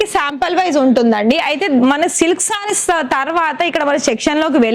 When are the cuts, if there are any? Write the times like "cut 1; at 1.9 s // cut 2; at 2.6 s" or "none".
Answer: none

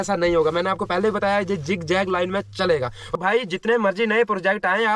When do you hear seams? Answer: cut 1; at 3.2 s

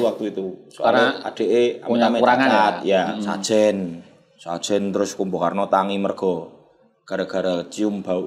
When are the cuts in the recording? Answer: cut 1; at 3.4 s

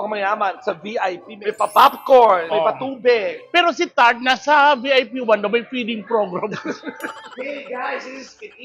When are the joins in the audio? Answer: cut 1; at 7.3 s

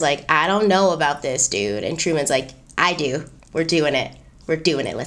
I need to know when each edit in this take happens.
cut 1; at 3.4 s

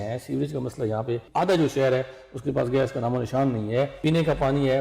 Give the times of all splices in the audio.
cut 1; at 1.3 s // cut 2; at 3.9 s

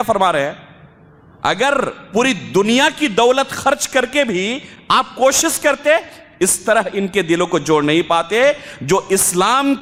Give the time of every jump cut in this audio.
none

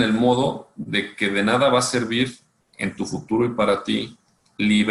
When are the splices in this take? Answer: none

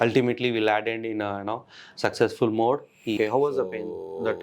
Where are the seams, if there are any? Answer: cut 1; at 3.2 s

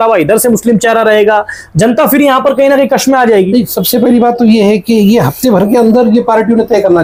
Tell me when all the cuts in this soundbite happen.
none

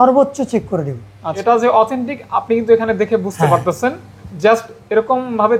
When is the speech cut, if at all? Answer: cut 1; at 1.3 s

